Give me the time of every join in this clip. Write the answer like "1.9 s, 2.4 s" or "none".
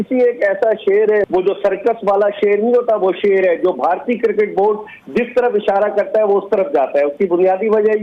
1.2 s